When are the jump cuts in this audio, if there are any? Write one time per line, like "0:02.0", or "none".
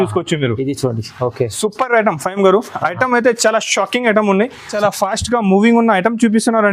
0:04.7